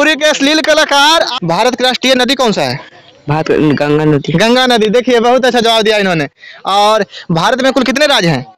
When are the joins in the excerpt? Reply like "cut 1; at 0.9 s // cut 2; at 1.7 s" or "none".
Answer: cut 1; at 1.3 s